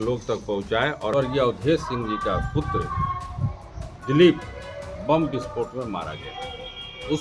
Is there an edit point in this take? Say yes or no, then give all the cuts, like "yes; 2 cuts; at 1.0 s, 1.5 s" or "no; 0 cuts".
yes; 1 cut; at 1.1 s